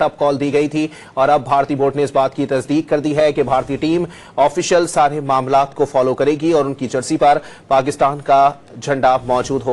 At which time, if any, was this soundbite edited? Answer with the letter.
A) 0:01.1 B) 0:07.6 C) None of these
C